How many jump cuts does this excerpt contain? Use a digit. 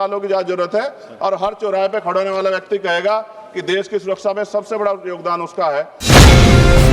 1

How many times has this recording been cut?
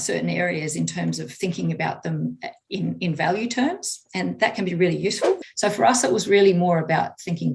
1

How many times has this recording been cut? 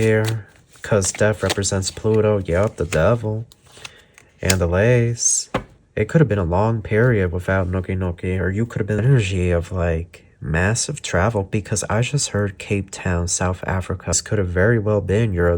2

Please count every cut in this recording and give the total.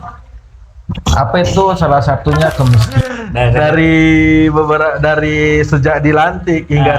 1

